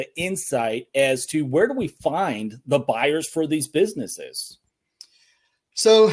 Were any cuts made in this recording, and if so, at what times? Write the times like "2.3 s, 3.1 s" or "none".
none